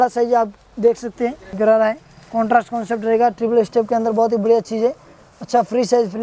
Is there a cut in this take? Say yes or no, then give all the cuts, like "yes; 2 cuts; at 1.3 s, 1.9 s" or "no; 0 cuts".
yes; 1 cut; at 1.4 s